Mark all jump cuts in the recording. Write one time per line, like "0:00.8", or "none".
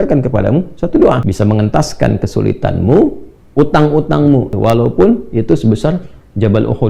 0:01.3
0:04.5